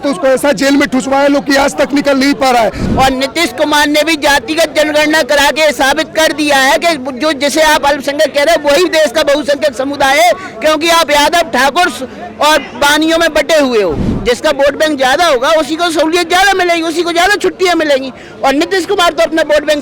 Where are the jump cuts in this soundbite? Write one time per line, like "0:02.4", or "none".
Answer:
0:02.8
0:14.1

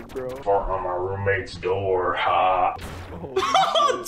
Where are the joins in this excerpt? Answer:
none

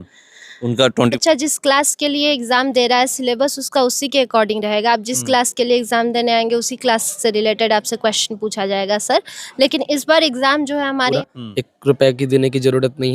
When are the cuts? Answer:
0:01.1
0:11.2

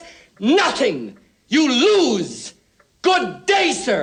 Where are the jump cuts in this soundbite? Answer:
none

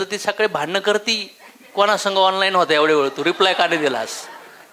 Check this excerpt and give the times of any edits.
none

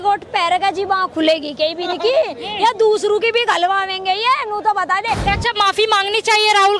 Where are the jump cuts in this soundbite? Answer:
0:05.2

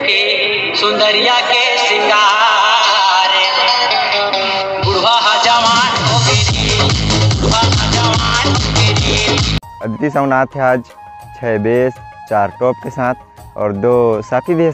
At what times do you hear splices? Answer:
0:09.8

